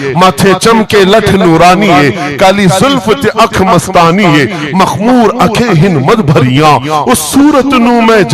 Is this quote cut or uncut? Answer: uncut